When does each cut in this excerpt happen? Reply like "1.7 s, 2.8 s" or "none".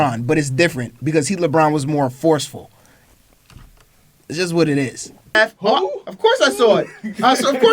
5.4 s